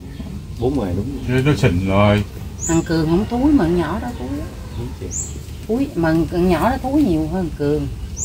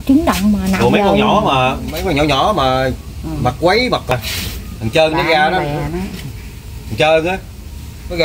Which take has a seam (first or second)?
second